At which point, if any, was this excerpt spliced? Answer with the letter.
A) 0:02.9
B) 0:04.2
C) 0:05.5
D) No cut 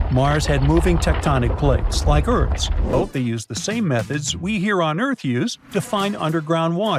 A